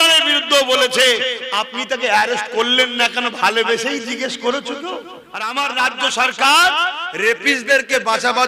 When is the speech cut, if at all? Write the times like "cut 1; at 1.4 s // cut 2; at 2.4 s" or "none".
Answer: cut 1; at 5.4 s